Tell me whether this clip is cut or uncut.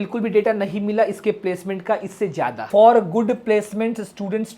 cut